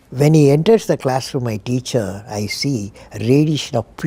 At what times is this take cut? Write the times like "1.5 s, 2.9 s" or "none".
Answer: none

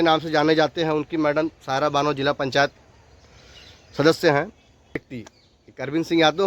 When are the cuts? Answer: 5.0 s

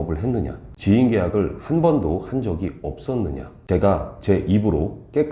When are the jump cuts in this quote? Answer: 3.5 s

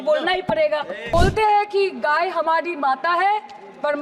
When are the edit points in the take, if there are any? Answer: 1.1 s

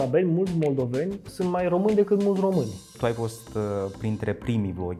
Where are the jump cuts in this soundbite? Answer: 2.9 s

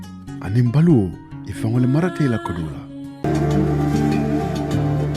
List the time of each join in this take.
3.2 s

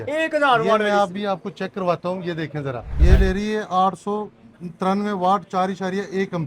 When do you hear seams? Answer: none

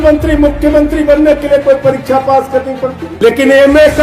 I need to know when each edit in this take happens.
3.0 s

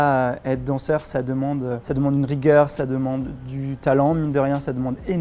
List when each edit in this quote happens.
none

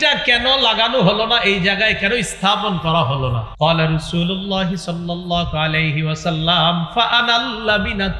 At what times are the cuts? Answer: 3.4 s

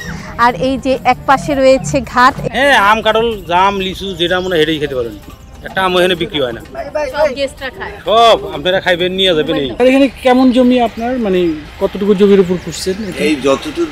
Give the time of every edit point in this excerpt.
2.4 s, 9.8 s

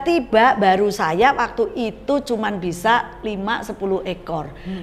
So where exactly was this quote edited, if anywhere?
none

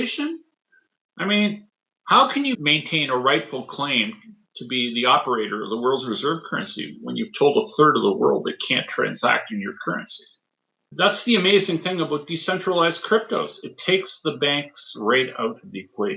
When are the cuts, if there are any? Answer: 10.9 s

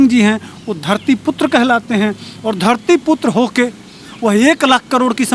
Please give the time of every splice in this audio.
none

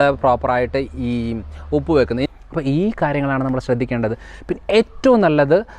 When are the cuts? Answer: 2.2 s

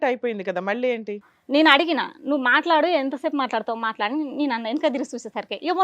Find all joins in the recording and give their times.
1.3 s

